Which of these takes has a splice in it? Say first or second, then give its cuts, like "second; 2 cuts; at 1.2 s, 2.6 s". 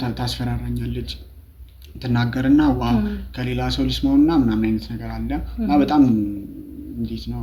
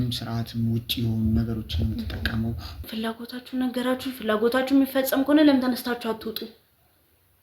second; 1 cut; at 2.8 s